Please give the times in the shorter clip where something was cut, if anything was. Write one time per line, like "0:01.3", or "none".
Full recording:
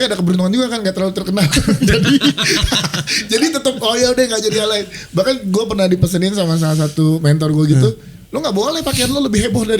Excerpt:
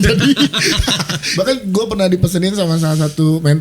0:01.2